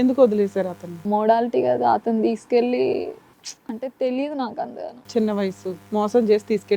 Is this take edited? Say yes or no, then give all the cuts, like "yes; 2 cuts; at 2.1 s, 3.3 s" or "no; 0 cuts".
yes; 1 cut; at 0.9 s